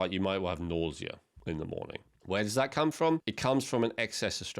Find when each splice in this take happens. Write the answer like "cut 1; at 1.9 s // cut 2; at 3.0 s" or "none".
cut 1; at 1.3 s // cut 2; at 2.1 s // cut 3; at 3.3 s